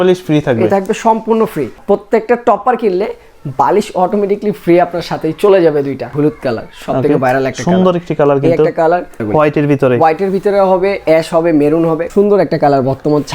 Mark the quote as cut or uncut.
cut